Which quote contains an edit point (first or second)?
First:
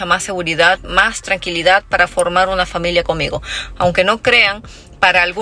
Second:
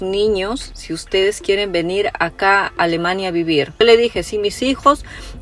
second